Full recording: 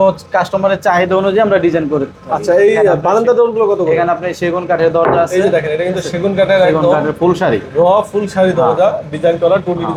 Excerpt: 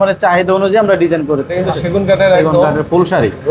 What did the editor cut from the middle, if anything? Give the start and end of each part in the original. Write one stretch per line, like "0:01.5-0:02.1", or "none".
0:02.2-0:05.8